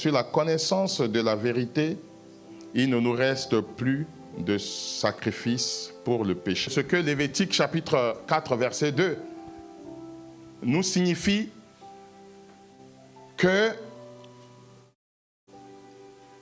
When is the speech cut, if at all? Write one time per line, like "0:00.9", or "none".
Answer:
0:06.7